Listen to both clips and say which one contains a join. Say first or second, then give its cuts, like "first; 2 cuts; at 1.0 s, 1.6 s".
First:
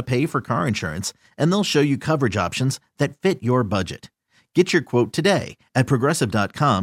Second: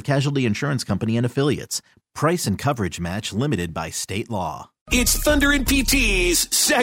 second; 1 cut; at 4.8 s